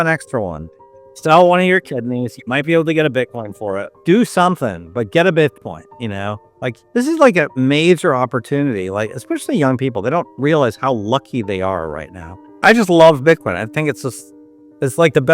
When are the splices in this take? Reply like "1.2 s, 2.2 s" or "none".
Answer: 4.0 s, 6.8 s, 12.5 s